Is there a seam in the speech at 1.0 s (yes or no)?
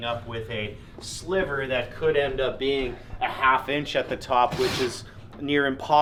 no